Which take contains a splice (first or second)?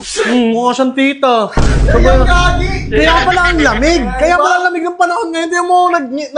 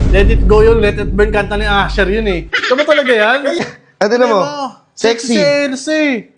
second